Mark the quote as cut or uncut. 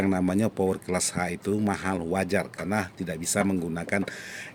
uncut